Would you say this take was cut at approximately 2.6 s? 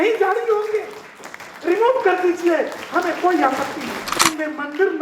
no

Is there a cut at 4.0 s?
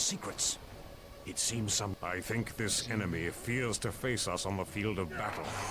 no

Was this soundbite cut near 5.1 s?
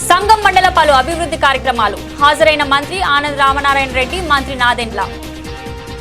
yes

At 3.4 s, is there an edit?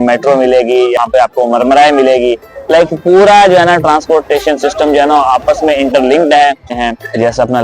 no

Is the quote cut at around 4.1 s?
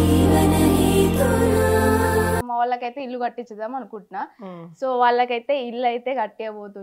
no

